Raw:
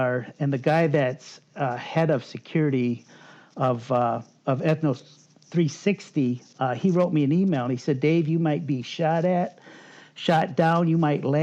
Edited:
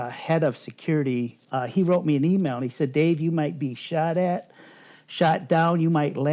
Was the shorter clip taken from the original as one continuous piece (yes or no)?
no